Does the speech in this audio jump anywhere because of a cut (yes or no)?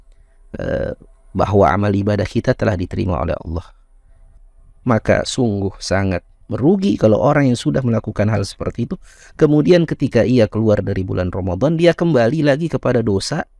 yes